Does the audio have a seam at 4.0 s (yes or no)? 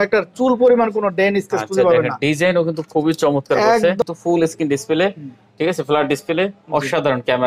yes